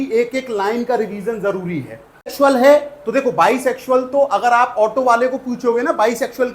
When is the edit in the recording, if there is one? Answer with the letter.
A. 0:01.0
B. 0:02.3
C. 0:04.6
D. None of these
B